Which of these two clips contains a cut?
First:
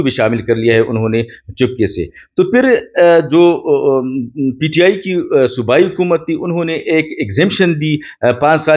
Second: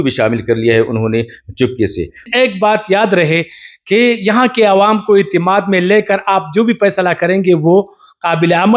second; 1 cut; at 2.3 s

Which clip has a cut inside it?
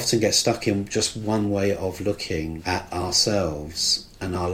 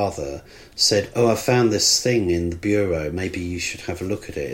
first; 1 cut; at 2.6 s

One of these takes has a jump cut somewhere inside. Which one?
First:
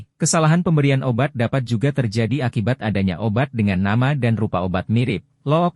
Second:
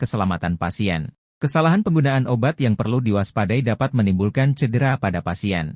second; 1 cut; at 1.2 s

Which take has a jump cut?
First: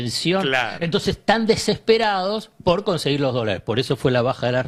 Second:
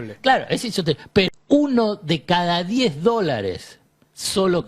second; 1 cut; at 1.3 s

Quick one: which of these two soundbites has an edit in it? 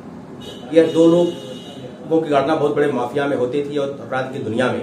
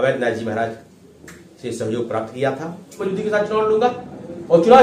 second; 1 cut; at 3.0 s

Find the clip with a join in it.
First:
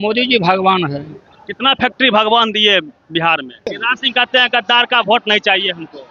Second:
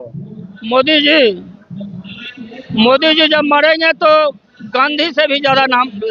first; 1 cut; at 3.7 s

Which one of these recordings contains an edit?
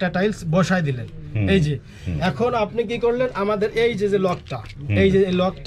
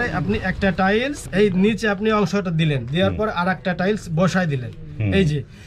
second; 1 cut; at 1.2 s

